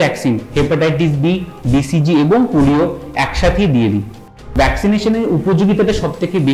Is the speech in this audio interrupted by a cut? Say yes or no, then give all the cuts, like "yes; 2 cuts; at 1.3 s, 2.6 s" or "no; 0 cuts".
yes; 1 cut; at 4.4 s